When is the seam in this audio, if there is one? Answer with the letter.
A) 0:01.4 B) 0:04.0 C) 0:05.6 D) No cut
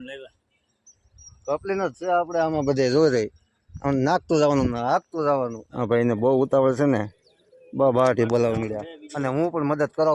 C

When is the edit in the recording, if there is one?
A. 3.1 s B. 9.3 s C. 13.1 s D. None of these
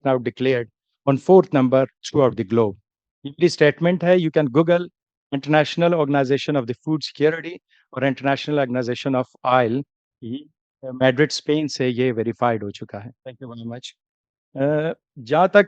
D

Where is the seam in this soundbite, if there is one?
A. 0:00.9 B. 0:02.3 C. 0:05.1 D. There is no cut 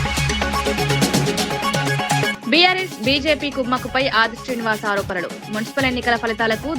B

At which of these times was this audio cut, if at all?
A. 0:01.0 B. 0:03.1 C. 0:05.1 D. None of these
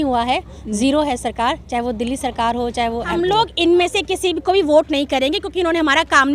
B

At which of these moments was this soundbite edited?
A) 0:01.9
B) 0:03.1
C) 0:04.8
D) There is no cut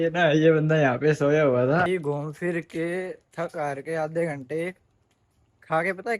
A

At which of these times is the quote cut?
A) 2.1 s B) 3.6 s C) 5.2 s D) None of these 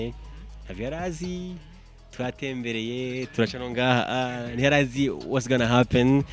D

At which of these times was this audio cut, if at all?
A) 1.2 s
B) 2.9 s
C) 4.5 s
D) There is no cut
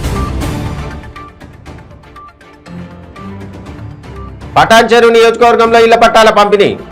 C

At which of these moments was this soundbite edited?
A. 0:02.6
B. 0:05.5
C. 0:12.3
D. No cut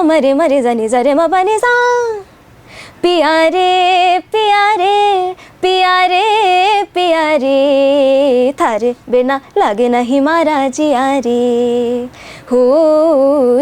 D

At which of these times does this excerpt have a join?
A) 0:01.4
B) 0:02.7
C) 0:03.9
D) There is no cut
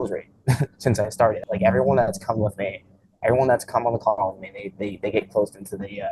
A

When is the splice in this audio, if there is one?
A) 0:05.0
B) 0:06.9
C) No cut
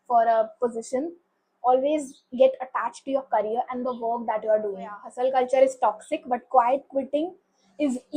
A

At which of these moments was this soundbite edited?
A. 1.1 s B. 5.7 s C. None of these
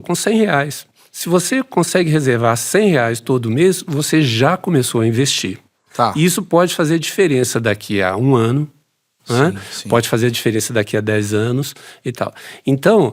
C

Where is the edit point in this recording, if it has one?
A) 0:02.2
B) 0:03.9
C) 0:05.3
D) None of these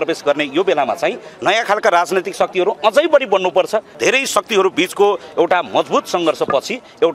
B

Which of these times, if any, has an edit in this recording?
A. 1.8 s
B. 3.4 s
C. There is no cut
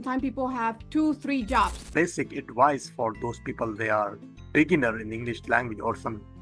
A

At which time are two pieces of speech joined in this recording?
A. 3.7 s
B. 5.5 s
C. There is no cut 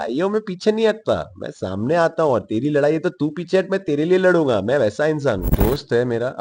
B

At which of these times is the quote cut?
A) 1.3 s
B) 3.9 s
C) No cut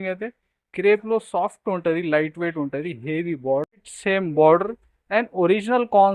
B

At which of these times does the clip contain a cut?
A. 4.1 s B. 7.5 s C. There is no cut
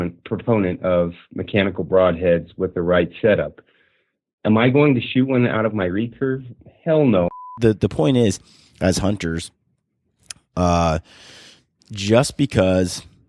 B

